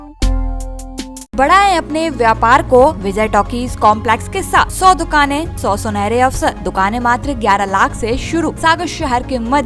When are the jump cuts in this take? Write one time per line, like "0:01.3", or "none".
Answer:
0:01.3
0:03.0
0:04.7
0:05.5
0:06.6
0:08.6